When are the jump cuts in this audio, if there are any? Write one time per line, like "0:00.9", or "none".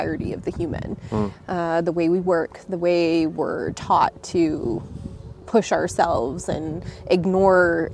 none